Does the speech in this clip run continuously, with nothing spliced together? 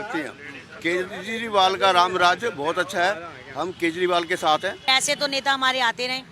no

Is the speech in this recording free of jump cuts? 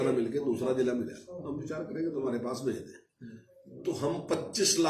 no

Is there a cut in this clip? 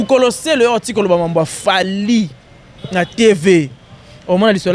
no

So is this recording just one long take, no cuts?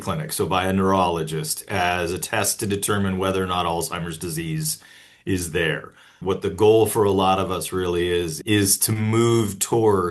no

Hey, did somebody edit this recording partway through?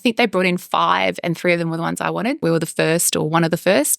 yes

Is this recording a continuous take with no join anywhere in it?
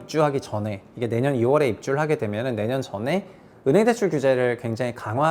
yes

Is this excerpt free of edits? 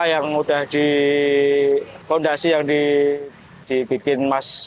yes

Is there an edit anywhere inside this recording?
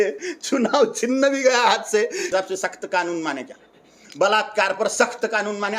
yes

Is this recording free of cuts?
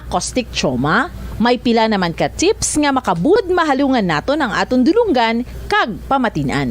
no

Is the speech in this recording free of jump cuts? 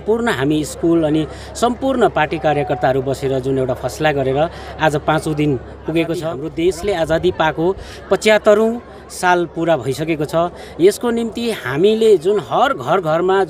no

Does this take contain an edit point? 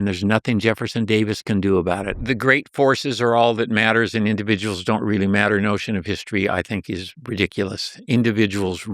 yes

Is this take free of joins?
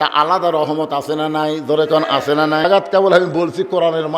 no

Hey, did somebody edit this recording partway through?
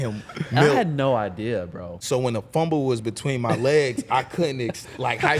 yes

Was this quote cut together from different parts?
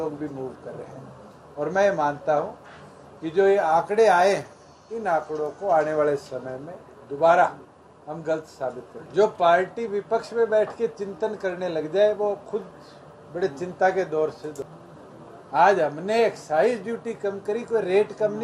yes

